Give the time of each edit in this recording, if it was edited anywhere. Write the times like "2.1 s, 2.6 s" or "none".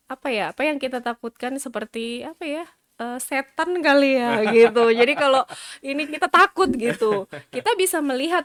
none